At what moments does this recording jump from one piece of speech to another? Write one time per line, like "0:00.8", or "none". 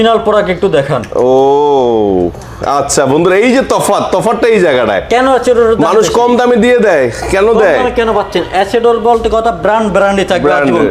none